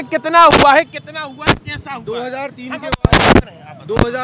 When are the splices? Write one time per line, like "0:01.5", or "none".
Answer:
none